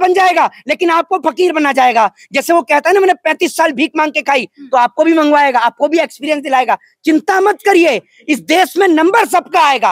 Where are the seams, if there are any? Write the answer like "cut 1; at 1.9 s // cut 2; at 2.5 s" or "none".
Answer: none